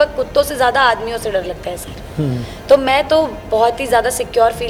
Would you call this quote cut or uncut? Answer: uncut